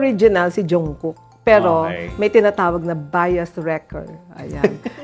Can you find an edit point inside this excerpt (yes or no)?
no